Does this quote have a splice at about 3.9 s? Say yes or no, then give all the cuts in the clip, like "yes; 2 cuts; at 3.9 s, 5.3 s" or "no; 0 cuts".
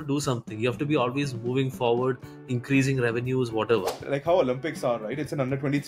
yes; 1 cut; at 3.9 s